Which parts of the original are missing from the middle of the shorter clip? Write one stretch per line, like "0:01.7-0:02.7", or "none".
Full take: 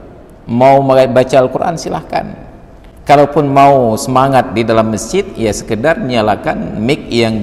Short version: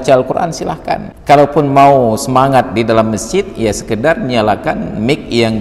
0:02.4-0:02.9